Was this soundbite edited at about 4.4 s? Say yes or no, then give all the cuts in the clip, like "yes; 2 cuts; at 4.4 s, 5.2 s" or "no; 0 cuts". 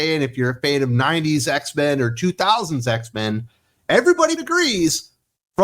yes; 1 cut; at 4.4 s